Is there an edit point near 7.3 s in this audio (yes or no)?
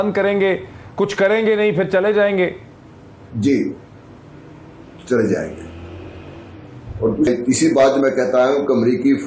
yes